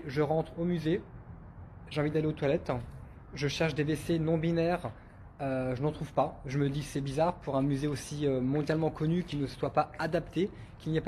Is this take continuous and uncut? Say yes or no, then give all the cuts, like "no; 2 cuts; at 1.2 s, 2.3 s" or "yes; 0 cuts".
no; 1 cut; at 6.8 s